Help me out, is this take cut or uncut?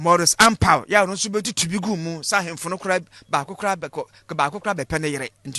cut